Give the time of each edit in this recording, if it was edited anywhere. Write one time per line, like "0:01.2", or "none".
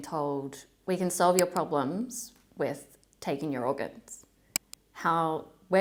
none